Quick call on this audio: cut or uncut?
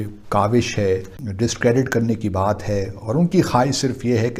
cut